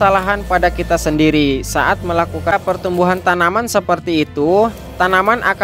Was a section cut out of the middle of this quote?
yes; 1 cut; at 2.5 s

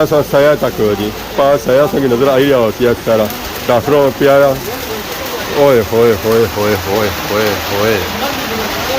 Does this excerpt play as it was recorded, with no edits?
yes; 0 cuts

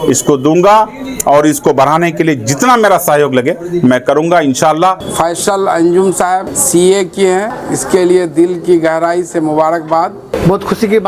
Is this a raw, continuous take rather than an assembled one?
no; 4 cuts; at 5.0 s, 6.6 s, 7.6 s, 10.3 s

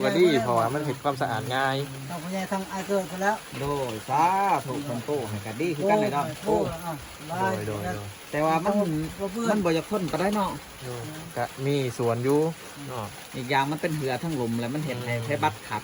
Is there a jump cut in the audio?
no; 0 cuts

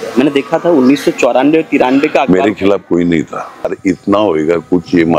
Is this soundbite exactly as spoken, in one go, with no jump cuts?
no; 1 cut; at 3.7 s

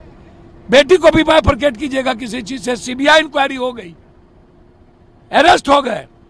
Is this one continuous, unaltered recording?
yes; 0 cuts

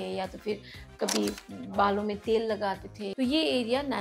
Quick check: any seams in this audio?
yes; 1 cut; at 3.0 s

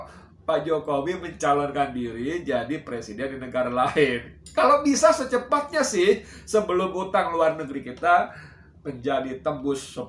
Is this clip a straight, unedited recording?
yes; 0 cuts

